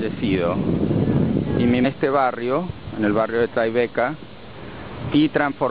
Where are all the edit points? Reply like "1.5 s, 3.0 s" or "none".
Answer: none